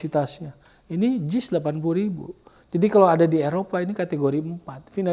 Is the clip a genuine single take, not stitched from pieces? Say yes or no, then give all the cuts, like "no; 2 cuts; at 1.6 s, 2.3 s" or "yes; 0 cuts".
yes; 0 cuts